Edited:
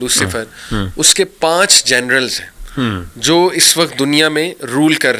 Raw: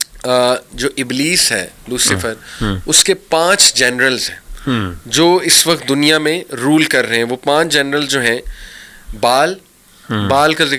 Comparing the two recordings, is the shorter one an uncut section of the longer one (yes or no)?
yes